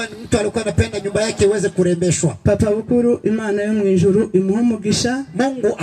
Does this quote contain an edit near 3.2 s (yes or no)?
no